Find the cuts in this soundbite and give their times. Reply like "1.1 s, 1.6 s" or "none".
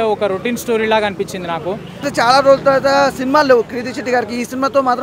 2.1 s